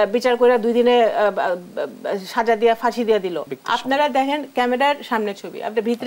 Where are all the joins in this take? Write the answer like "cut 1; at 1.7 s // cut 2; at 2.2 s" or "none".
cut 1; at 3.5 s